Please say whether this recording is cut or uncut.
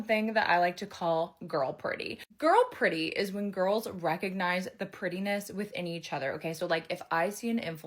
uncut